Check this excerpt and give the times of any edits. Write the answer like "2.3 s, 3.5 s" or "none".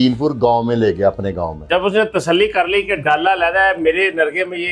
none